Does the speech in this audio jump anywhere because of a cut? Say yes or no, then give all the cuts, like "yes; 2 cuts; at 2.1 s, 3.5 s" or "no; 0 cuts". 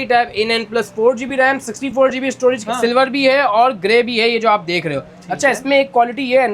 no; 0 cuts